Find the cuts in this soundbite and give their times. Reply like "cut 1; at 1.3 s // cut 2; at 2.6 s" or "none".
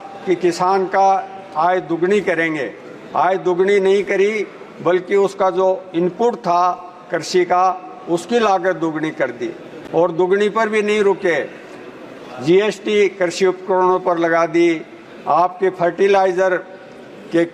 none